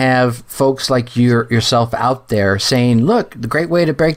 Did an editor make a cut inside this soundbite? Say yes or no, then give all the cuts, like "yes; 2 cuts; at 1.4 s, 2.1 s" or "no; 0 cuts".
no; 0 cuts